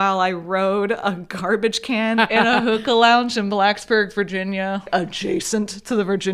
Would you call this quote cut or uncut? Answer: uncut